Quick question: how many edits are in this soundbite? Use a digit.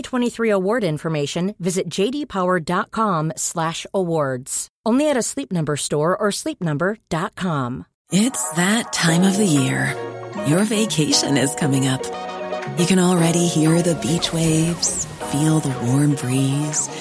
1